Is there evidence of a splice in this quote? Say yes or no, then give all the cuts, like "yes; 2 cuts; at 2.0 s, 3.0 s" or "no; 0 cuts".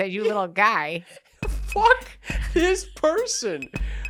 no; 0 cuts